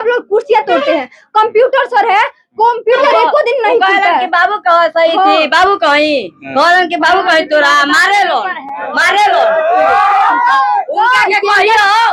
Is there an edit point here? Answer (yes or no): no